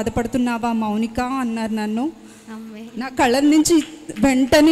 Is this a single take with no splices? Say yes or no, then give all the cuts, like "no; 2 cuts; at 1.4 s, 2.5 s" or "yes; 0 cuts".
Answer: yes; 0 cuts